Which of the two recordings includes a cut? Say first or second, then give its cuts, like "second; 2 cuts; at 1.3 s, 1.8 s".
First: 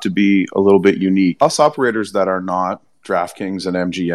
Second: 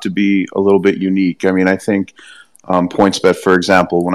first; 1 cut; at 1.4 s